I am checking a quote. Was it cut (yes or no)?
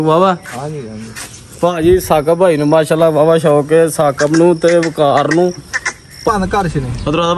yes